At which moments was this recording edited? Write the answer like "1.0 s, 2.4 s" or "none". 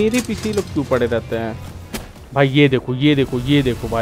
1.7 s